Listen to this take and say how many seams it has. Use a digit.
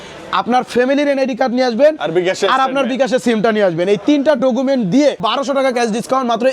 1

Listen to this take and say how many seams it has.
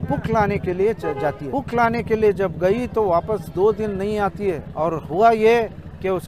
2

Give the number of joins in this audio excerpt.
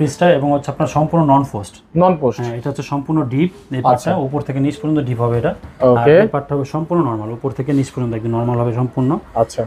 0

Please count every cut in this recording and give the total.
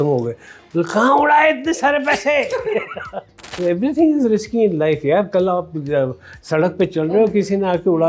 1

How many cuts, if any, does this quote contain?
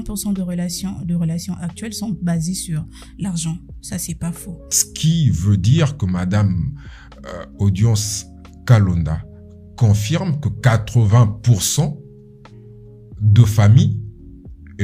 1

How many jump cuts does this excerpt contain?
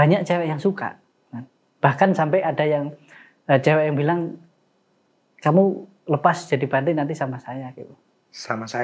0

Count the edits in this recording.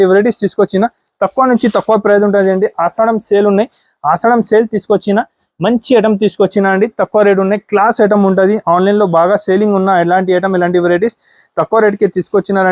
0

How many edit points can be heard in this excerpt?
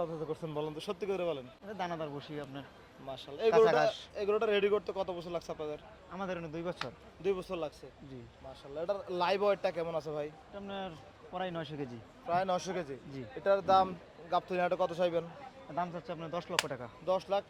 0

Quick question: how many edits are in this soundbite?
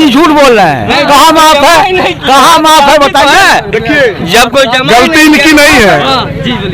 0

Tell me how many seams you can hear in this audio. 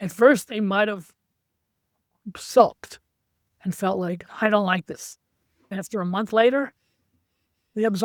0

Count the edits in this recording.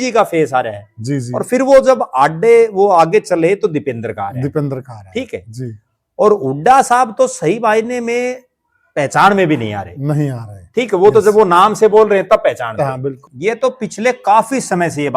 1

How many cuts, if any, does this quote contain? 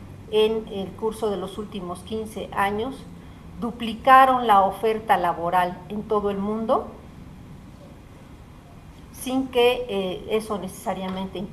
1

